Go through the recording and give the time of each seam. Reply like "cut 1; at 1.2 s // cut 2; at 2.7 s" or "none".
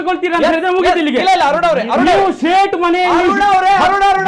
none